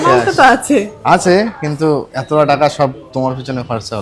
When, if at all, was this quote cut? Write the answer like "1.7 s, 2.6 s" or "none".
none